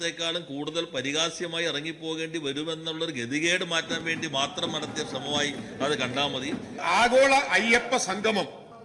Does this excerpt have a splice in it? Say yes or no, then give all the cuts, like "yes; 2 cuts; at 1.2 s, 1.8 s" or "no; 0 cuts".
yes; 1 cut; at 6.8 s